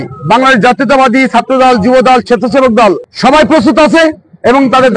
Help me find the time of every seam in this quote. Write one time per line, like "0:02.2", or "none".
0:03.1